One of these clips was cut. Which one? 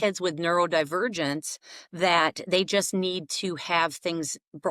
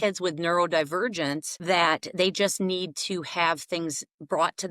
second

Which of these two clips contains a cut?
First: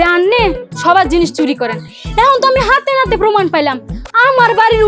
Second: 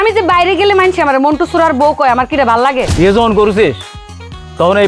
second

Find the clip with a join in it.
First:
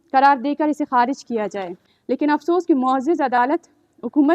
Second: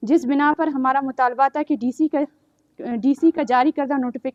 first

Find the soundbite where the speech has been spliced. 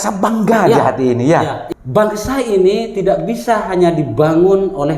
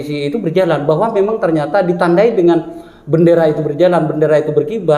first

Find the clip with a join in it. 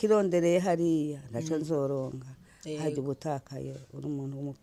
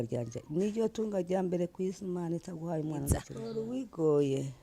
second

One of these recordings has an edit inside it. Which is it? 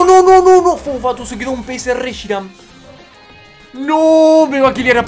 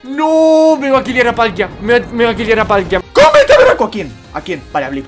second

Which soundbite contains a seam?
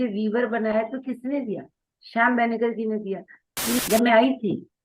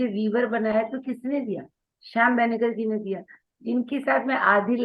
first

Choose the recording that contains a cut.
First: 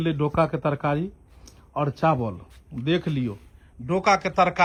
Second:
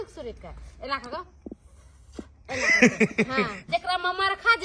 second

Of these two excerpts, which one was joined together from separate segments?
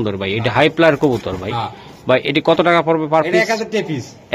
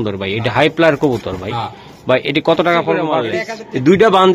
second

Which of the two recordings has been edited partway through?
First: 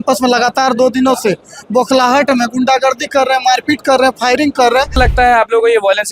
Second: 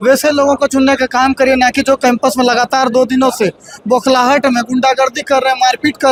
first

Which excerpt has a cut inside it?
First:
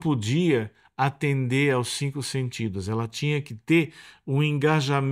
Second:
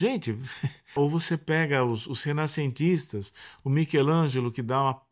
second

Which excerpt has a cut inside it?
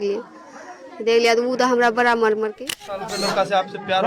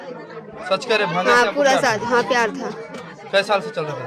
first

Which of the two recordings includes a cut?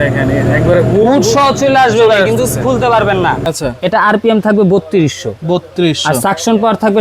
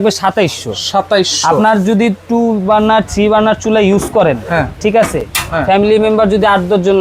first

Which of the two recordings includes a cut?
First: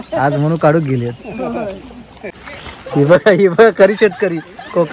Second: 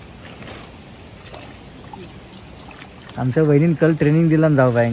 first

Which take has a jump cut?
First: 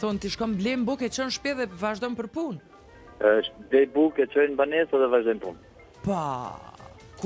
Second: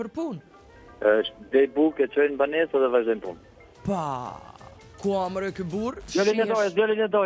second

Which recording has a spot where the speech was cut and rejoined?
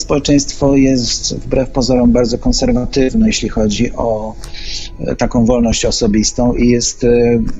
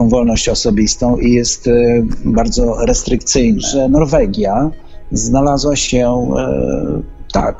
second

